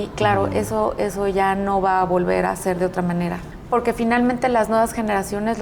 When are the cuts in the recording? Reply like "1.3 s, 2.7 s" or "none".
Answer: 3.5 s